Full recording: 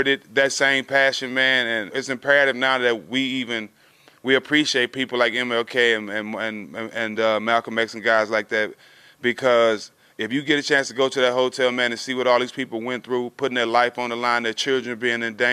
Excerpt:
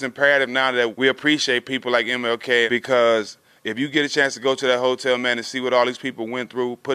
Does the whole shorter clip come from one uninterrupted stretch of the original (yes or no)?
no